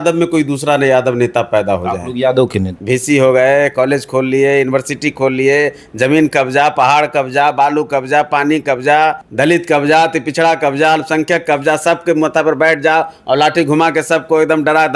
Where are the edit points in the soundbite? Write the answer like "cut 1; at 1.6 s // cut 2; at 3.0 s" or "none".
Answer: cut 1; at 2.7 s // cut 2; at 9.2 s